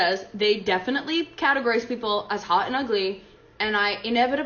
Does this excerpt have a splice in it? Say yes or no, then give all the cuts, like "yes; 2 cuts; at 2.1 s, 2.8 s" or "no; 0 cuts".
no; 0 cuts